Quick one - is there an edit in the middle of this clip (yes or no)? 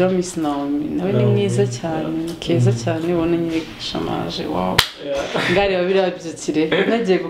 no